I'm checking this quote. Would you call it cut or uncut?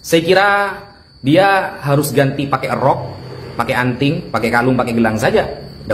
uncut